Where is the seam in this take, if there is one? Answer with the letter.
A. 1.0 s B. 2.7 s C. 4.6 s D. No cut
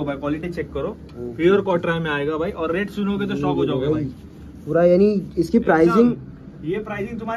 D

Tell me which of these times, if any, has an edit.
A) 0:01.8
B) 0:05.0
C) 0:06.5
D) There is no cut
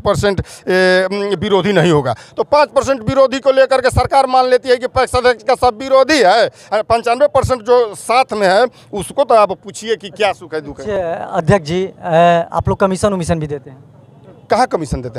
D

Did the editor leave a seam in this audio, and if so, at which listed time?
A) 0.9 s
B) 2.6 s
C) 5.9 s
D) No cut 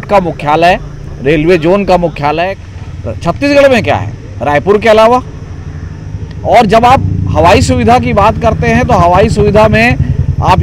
B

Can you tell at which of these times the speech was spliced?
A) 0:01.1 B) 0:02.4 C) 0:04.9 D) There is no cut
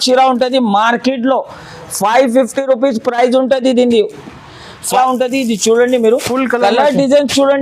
C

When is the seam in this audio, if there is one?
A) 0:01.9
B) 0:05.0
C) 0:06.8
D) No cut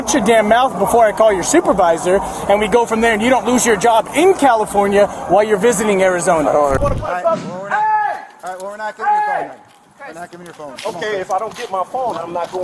C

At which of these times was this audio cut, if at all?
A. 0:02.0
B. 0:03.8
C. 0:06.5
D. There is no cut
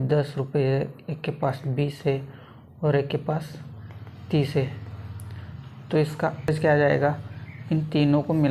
C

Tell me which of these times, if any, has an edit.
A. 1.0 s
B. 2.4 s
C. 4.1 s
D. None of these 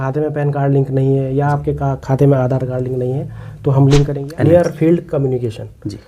C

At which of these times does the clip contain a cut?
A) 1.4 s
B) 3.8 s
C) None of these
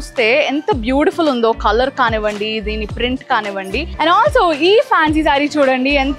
B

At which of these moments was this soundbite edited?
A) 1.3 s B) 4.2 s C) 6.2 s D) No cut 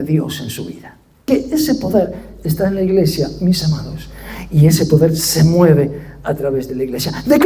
A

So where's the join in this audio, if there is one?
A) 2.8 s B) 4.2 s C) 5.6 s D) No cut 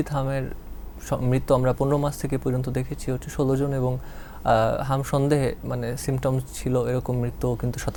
D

